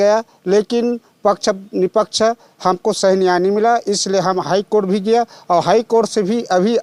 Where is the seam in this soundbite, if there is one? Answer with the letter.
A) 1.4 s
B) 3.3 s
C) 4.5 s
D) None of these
D